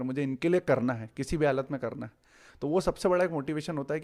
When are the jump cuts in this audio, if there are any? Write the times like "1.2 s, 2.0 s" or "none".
none